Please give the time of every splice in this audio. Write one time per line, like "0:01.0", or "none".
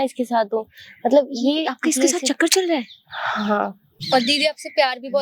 0:03.9